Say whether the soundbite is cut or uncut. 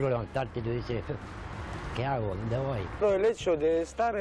cut